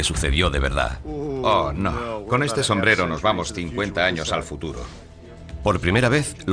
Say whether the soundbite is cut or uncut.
uncut